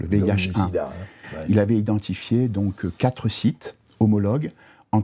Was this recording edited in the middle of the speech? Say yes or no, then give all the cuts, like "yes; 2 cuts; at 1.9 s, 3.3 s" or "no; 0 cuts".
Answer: no; 0 cuts